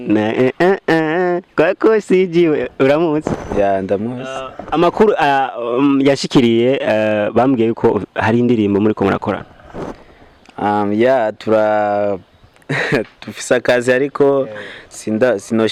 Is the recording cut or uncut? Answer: uncut